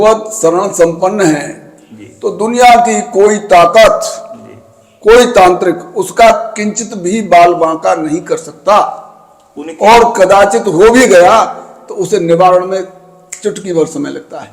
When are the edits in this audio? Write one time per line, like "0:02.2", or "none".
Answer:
none